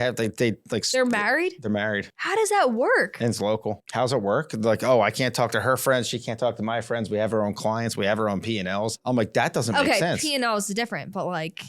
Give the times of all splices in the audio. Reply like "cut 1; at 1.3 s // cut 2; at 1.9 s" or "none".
cut 1; at 2.1 s // cut 2; at 3.8 s // cut 3; at 9.0 s